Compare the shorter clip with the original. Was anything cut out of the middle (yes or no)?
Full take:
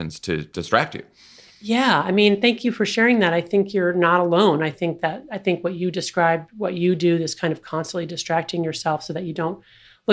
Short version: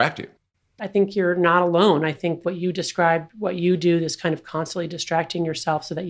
yes